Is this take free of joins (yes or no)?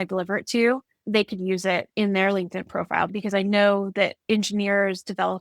no